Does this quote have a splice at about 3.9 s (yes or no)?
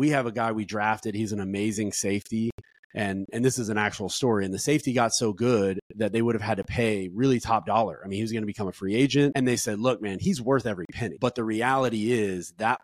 no